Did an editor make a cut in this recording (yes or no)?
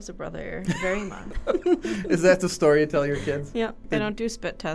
yes